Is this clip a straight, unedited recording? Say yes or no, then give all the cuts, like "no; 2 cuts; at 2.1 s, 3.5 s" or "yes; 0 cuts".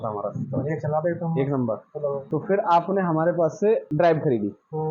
no; 2 cuts; at 2.2 s, 3.9 s